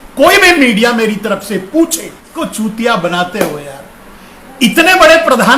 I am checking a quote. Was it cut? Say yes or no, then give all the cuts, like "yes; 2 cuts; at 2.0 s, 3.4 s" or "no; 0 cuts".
yes; 1 cut; at 2.3 s